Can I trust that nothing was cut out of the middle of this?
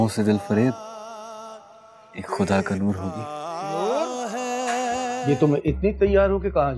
no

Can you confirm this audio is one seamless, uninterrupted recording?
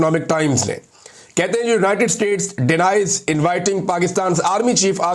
yes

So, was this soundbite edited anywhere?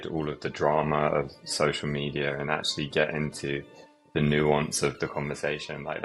no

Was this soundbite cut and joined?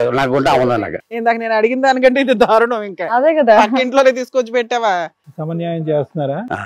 no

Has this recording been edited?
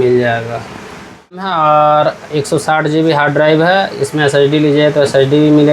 yes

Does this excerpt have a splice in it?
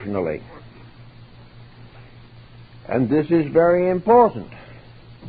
no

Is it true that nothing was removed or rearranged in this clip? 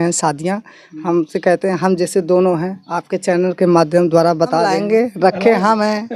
no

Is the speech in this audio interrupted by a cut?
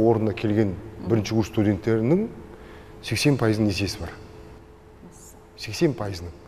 no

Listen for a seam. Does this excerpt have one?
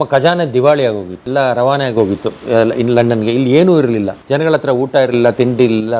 yes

